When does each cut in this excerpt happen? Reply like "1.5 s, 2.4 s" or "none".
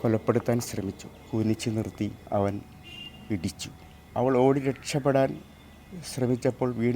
1.1 s, 2.2 s, 4.1 s

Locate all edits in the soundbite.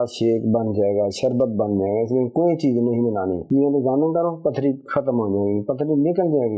3.4 s

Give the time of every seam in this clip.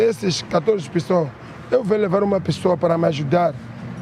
none

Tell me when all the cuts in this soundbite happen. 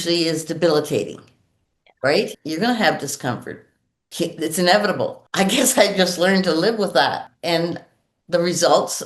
2.4 s, 7.3 s

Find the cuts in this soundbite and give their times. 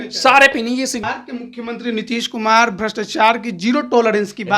1.0 s

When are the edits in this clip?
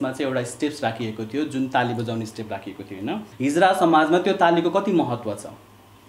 3.2 s

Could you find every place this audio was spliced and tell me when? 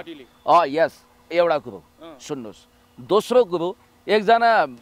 none

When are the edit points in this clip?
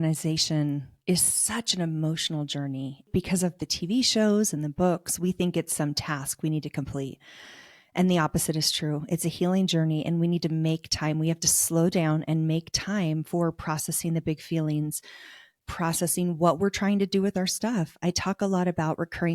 3.1 s

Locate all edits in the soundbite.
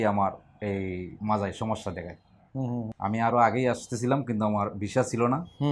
2.9 s

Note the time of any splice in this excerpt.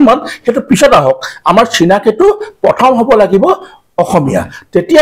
none

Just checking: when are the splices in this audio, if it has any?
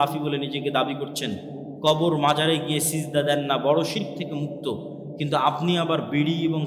none

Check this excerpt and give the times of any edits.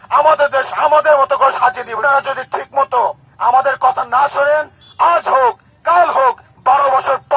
2.0 s

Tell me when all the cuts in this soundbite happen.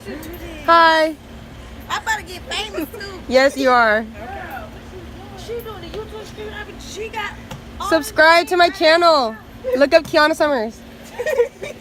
none

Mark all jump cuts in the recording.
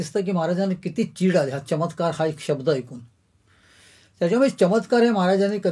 none

